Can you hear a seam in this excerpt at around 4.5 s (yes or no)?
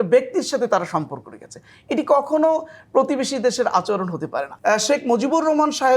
yes